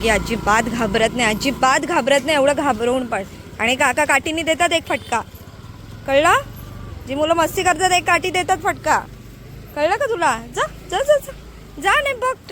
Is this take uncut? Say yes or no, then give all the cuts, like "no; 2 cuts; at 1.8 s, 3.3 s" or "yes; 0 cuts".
yes; 0 cuts